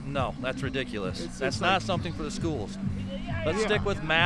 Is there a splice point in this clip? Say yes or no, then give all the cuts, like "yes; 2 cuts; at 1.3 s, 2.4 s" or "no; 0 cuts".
no; 0 cuts